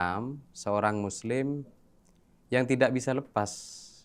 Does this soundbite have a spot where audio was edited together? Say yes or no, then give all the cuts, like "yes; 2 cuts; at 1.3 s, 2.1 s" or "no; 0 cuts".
no; 0 cuts